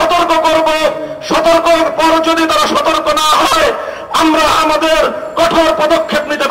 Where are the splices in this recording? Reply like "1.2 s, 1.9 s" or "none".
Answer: none

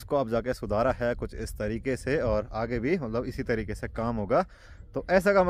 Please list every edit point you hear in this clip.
none

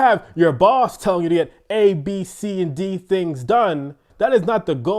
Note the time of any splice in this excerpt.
4.1 s

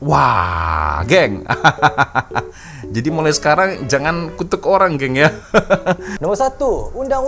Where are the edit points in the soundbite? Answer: 6.1 s

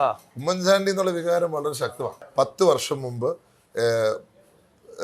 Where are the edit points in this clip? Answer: 2.1 s

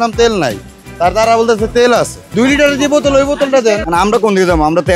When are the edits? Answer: 2.2 s, 3.8 s

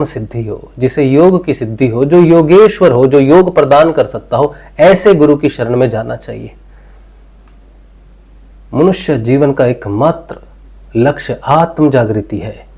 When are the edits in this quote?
none

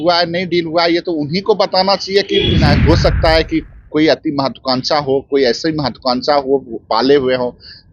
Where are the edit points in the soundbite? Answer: 2.6 s

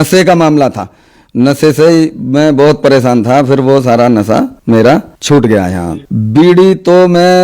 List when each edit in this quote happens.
none

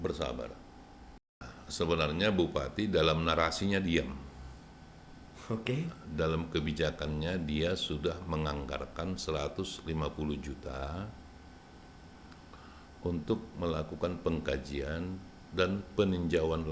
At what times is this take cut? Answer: 1.4 s

